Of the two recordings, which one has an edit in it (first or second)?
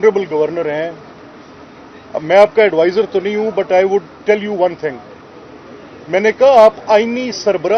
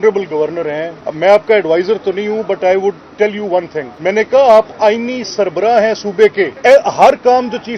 second